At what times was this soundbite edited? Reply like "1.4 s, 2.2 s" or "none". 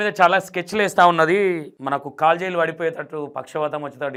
none